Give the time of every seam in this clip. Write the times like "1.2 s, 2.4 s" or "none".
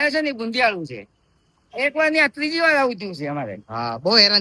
none